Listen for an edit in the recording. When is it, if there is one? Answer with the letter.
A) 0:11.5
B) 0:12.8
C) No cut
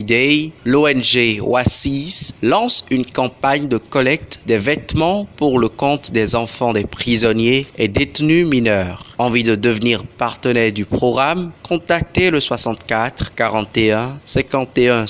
C